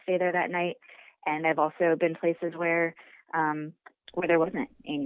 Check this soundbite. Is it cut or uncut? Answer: uncut